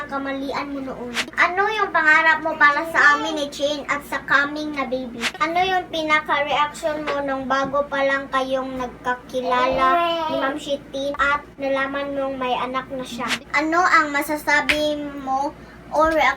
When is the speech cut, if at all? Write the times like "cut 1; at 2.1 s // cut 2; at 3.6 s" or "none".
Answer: cut 1; at 1.3 s // cut 2; at 5.4 s // cut 3; at 11.3 s // cut 4; at 13.4 s